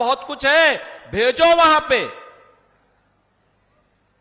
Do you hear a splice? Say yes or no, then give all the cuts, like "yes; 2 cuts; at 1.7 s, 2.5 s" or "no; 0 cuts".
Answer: no; 0 cuts